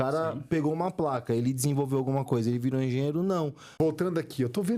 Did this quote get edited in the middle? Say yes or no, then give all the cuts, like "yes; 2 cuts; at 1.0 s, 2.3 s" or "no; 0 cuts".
yes; 1 cut; at 3.6 s